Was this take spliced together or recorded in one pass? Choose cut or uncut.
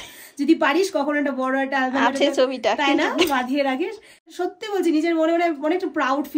cut